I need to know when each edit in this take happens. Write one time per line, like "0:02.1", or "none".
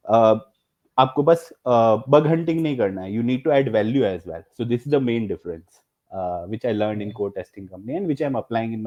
none